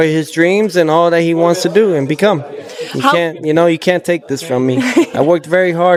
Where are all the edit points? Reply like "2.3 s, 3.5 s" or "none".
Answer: none